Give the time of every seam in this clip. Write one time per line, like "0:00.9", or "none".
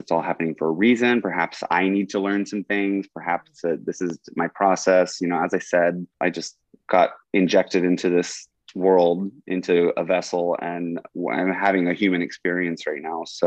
0:06.1